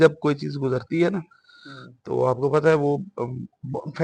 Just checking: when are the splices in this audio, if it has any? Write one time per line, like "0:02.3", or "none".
none